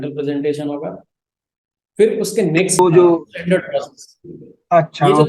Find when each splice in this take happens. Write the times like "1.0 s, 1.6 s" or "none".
2.8 s